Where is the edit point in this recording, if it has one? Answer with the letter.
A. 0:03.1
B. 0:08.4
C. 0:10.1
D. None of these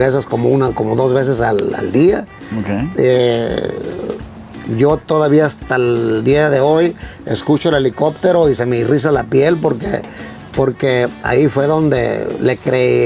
D